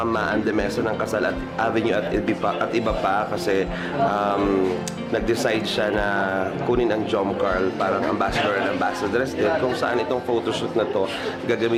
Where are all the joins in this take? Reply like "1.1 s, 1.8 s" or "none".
none